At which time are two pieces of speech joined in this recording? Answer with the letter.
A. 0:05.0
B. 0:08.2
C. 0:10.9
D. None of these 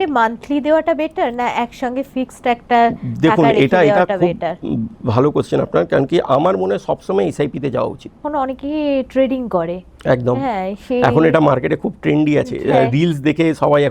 B